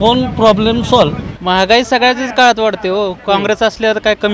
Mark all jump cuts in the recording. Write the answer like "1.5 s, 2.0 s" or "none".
1.2 s